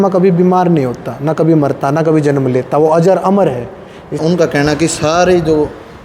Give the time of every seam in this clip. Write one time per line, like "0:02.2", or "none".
0:04.2